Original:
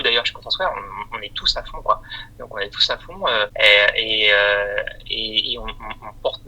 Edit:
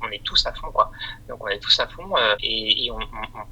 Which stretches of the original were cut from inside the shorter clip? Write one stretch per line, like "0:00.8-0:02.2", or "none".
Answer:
0:03.5-0:05.1